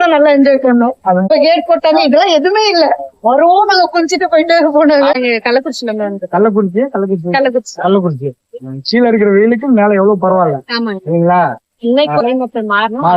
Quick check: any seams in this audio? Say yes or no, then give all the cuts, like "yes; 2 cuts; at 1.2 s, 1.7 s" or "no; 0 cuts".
yes; 2 cuts; at 1.3 s, 5.1 s